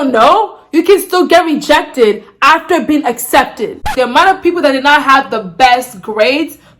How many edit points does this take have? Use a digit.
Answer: 1